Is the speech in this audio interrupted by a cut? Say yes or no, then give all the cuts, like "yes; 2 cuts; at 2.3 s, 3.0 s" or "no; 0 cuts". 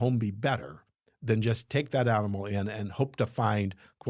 no; 0 cuts